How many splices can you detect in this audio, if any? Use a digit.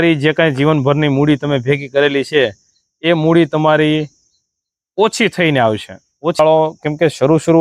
1